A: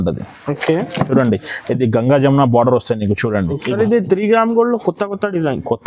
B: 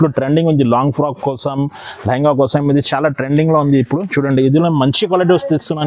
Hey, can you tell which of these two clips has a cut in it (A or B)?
A